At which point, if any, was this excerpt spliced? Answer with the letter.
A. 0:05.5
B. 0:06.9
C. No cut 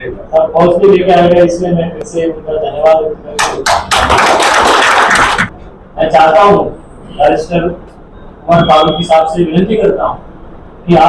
A